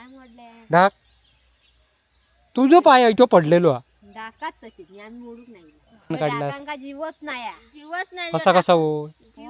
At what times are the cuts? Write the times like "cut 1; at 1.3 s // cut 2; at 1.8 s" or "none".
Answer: cut 1; at 6.1 s